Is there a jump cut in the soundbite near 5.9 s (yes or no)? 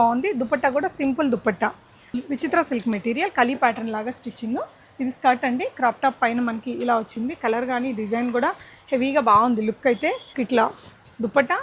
no